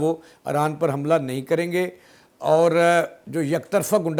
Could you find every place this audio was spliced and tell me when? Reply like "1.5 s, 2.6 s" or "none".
none